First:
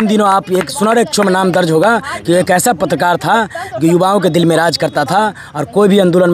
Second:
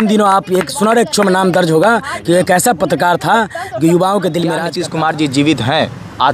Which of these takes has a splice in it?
second; 1 cut; at 4.7 s

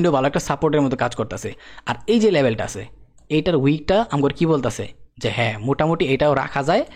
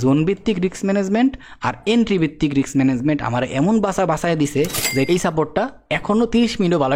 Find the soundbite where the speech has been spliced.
second; 1 cut; at 5.1 s

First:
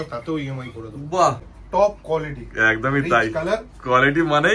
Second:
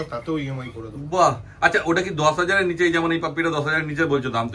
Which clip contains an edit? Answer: first; 1 cut; at 1.5 s

